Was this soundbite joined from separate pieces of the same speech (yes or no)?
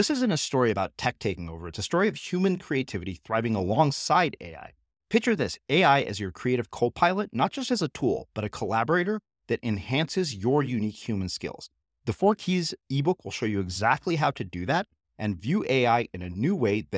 no